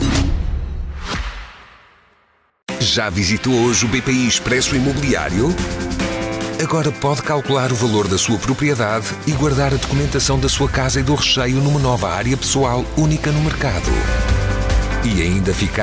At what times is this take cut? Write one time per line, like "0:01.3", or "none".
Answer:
0:00.9